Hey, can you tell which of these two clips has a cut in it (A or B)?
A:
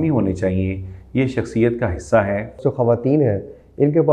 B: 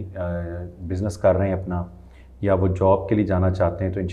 A